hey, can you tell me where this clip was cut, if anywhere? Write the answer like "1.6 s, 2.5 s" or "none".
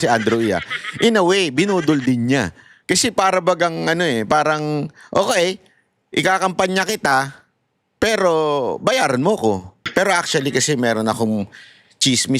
9.8 s